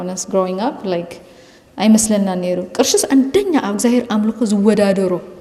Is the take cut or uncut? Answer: uncut